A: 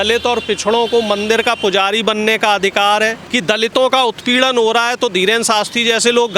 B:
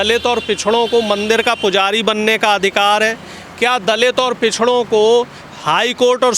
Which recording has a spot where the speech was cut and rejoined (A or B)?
A